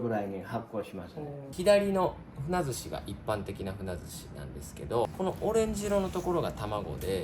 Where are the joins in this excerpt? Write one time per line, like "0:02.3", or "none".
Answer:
0:01.5
0:05.1